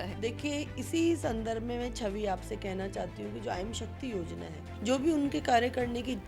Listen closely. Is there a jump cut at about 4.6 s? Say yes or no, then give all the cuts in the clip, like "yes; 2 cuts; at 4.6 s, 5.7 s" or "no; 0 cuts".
yes; 1 cut; at 4.6 s